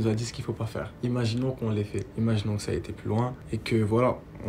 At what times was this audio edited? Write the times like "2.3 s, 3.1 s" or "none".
0.9 s, 2.1 s, 3.4 s